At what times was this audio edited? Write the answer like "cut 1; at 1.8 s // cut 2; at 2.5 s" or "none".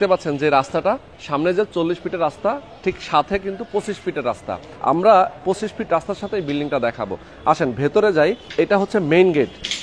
none